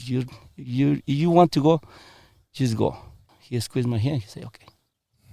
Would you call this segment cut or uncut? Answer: cut